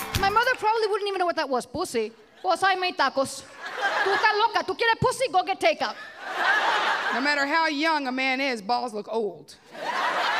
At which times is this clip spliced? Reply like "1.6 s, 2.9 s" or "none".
2.2 s, 4.0 s, 7.1 s